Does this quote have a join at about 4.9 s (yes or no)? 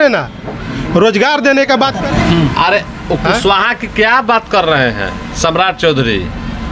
no